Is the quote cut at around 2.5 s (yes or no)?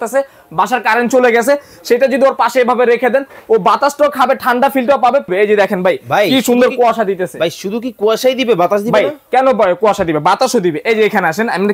no